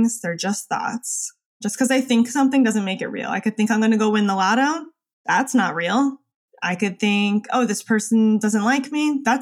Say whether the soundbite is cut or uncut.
cut